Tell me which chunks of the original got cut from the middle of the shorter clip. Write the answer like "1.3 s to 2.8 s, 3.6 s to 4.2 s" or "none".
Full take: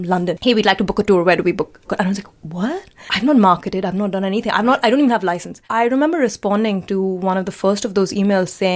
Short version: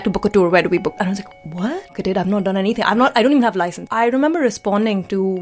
1.7 s to 2.0 s, 3.0 s to 3.7 s, 5.5 s to 5.6 s